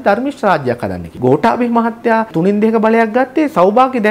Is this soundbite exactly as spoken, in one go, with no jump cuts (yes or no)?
no